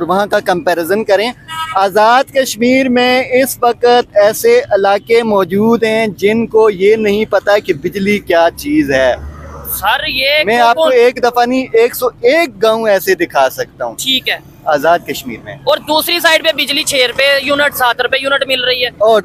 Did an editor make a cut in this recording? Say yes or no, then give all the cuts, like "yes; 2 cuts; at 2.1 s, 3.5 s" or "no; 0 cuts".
no; 0 cuts